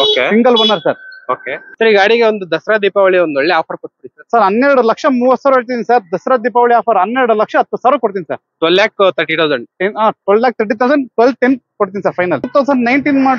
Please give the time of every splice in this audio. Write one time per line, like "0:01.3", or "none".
0:01.6
0:12.5